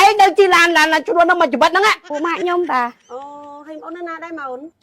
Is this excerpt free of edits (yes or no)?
no